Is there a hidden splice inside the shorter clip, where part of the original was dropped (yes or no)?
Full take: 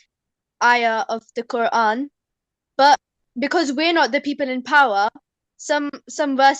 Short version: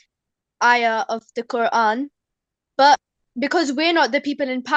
no